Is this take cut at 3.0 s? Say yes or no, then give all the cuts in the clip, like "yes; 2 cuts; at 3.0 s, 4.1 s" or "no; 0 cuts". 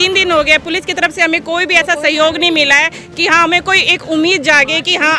no; 0 cuts